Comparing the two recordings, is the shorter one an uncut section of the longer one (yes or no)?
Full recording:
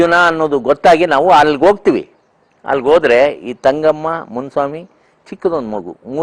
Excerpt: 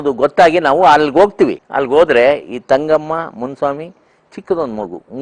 no